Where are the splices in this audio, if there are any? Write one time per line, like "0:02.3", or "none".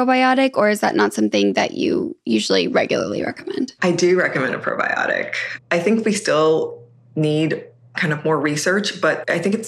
0:03.7
0:05.6